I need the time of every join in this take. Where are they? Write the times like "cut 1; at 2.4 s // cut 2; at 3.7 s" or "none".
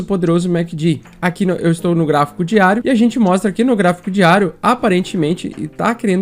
cut 1; at 2.8 s